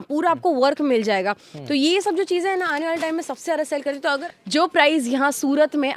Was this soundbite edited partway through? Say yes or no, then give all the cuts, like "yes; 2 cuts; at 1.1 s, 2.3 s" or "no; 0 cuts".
yes; 1 cut; at 4.2 s